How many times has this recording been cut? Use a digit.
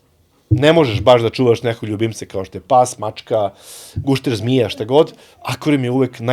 0